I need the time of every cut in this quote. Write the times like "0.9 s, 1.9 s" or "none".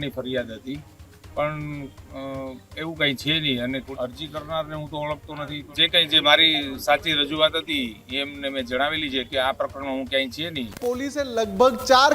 3.9 s, 5.6 s, 10.8 s